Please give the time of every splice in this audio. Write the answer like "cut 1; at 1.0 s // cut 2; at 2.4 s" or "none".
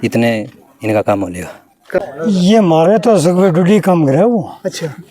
cut 1; at 2.0 s